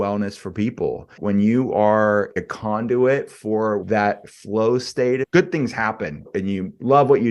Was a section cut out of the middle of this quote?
yes; 5 cuts; at 1.2 s, 2.5 s, 3.8 s, 5.3 s, 6.2 s

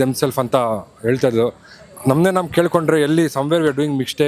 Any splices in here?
no; 0 cuts

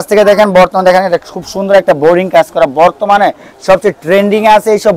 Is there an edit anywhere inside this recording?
no; 0 cuts

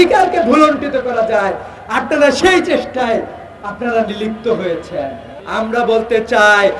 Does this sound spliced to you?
yes; 1 cut; at 5.3 s

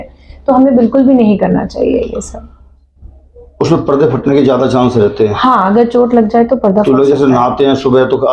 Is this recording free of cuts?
yes; 0 cuts

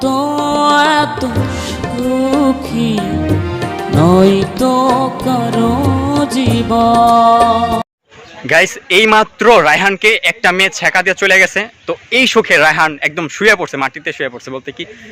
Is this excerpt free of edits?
no; 1 cut; at 8.1 s

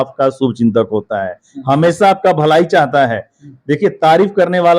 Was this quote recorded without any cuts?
yes; 0 cuts

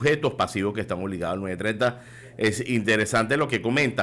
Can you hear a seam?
no; 0 cuts

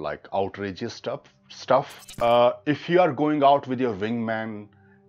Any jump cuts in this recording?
yes; 1 cut; at 2.0 s

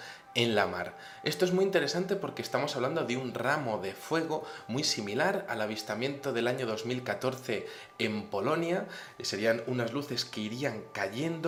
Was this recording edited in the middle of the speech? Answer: no; 0 cuts

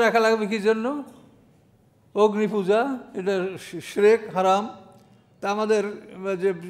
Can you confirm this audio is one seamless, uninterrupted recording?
yes; 0 cuts

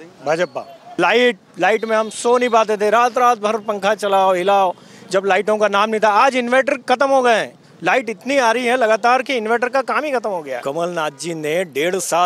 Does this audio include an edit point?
yes; 2 cuts; at 0.9 s, 10.6 s

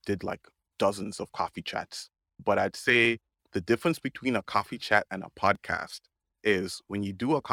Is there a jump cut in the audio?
yes; 1 cut; at 2.4 s

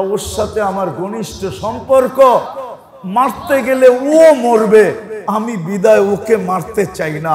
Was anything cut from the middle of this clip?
no; 0 cuts

